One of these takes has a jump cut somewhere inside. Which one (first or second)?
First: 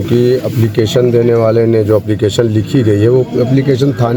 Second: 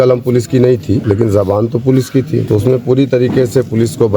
second